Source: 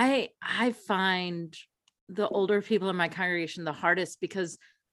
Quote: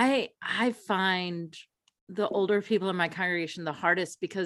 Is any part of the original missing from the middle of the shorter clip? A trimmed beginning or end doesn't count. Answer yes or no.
no